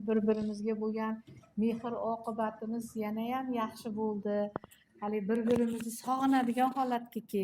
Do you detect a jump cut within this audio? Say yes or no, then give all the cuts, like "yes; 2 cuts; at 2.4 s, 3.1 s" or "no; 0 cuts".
no; 0 cuts